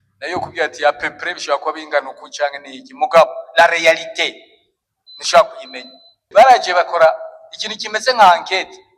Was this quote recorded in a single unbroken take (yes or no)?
no